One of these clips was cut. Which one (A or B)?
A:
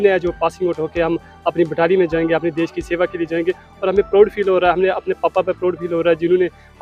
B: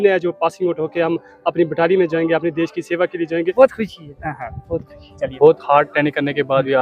B